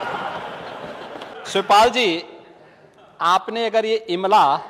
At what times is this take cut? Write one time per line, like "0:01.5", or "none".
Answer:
0:01.3